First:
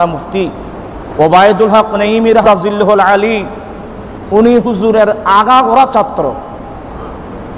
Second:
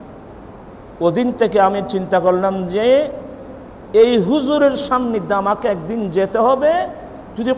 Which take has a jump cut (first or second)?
first